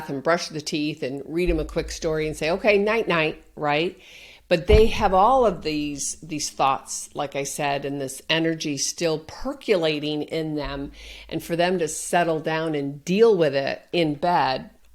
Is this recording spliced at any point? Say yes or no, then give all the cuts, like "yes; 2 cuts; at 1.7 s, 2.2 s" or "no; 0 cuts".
no; 0 cuts